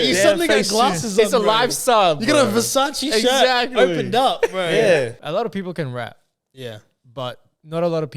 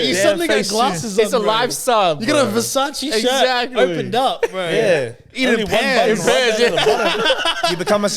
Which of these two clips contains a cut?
first; 1 cut; at 5.2 s

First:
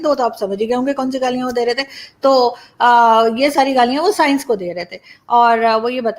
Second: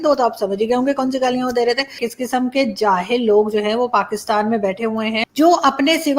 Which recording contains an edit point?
second; 2 cuts; at 2.0 s, 5.2 s

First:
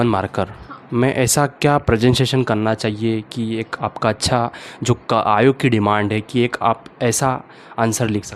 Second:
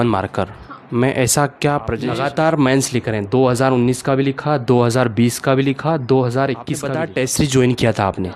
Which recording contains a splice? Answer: second; 2 cuts; at 1.9 s, 6.8 s

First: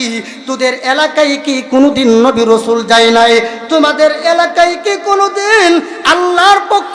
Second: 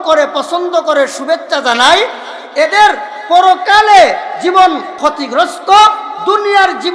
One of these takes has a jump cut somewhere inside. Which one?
second; 1 cut; at 4.9 s

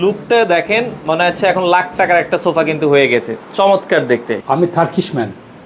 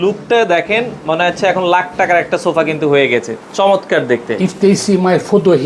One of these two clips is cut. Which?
second; 1 cut; at 4.3 s

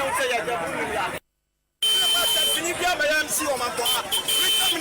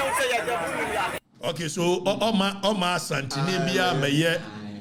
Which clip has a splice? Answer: first; 1 cut; at 1.2 s

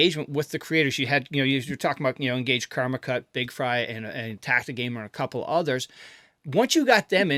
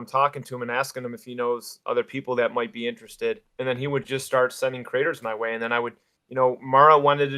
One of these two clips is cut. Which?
second; 1 cut; at 3.5 s

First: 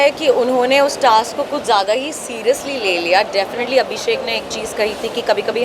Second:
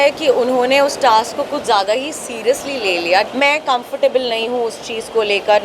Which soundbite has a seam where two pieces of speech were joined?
second; 1 cut; at 3.3 s

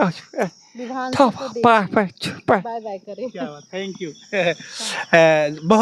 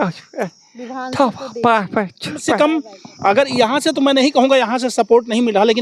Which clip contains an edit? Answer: second; 1 cut; at 2.6 s

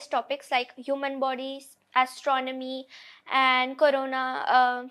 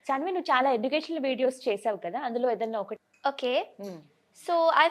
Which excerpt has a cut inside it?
second; 1 cut; at 2.9 s

